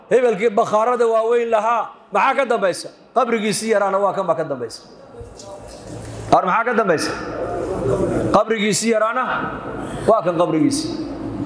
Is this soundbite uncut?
yes; 0 cuts

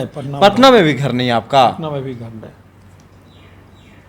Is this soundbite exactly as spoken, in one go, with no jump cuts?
yes; 0 cuts

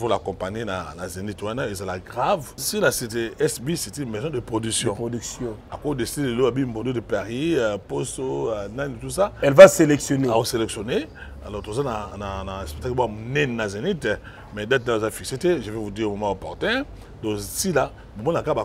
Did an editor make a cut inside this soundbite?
yes; 1 cut; at 2.6 s

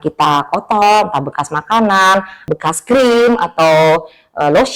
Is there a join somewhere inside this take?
yes; 1 cut; at 2.5 s

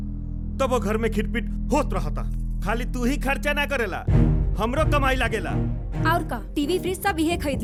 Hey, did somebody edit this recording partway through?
no; 0 cuts

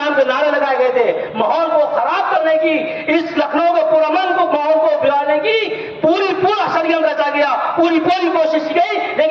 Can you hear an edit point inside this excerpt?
no; 0 cuts

